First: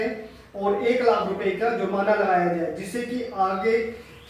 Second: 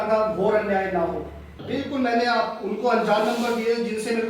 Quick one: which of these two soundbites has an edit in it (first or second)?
second